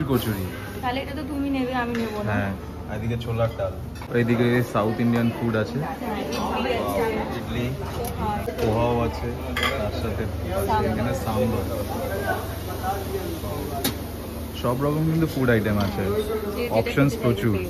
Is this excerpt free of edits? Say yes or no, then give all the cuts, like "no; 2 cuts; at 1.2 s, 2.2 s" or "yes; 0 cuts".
yes; 0 cuts